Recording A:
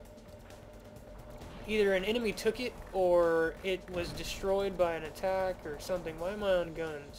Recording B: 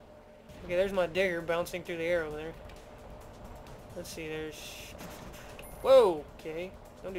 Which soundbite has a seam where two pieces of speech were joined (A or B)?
A